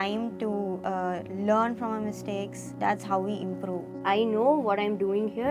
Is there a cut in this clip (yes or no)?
yes